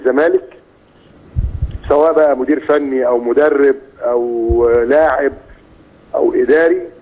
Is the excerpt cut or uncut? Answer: uncut